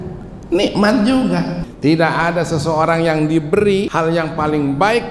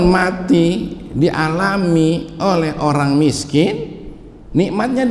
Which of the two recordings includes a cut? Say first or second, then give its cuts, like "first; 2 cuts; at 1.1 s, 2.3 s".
first; 2 cuts; at 1.6 s, 3.9 s